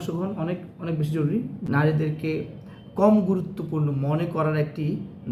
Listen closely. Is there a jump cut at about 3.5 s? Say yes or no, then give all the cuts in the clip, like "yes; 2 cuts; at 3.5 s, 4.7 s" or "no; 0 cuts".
no; 1 cut; at 1.6 s